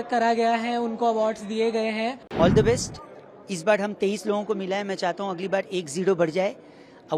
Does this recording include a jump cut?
yes; 1 cut; at 2.2 s

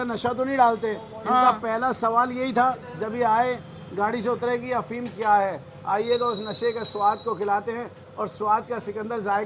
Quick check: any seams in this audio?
no; 0 cuts

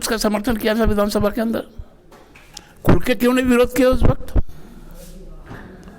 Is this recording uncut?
yes; 0 cuts

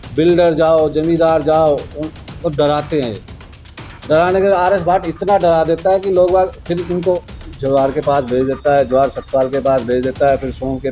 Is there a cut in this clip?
no; 0 cuts

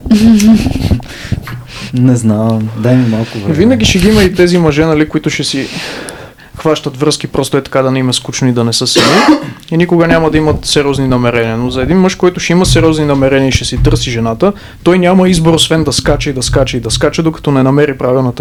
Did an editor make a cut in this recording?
no; 0 cuts

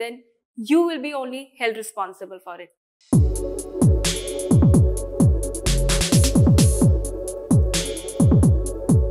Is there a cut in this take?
yes; 1 cut; at 2.9 s

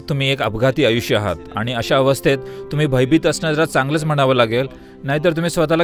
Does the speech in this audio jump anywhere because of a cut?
no; 0 cuts

